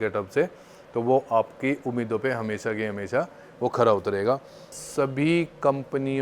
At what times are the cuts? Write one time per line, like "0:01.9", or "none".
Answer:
0:04.8